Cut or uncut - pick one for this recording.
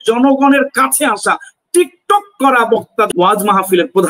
cut